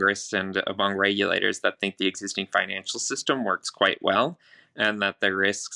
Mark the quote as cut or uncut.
uncut